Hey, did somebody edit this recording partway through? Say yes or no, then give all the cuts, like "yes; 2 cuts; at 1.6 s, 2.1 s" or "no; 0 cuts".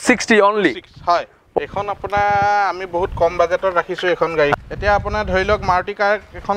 yes; 2 cuts; at 1.6 s, 4.5 s